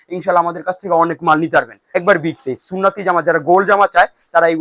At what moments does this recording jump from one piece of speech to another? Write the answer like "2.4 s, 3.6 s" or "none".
1.8 s

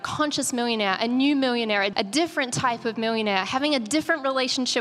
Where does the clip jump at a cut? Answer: 1.9 s

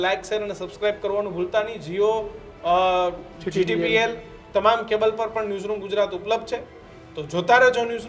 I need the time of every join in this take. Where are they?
none

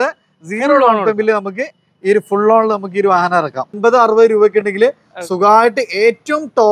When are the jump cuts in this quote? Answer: 3.7 s

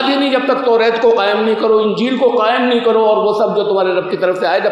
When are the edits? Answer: none

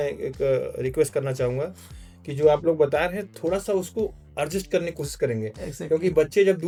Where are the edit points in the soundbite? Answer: none

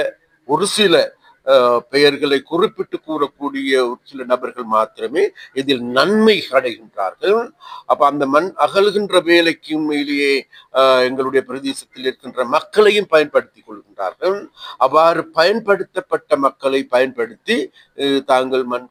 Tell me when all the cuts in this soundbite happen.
none

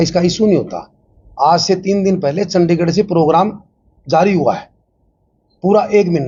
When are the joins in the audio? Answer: none

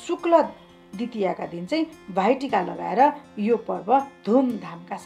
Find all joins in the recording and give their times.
none

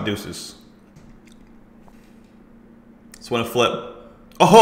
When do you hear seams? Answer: 0.9 s, 1.9 s

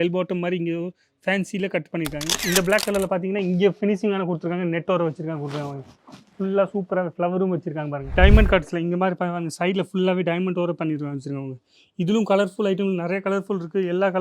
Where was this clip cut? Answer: 2.4 s, 8.1 s

